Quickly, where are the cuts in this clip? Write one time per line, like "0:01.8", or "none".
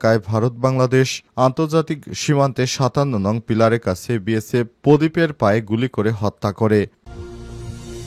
0:07.0